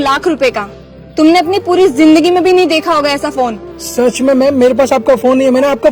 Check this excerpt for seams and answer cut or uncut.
uncut